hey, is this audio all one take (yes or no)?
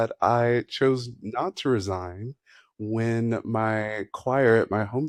yes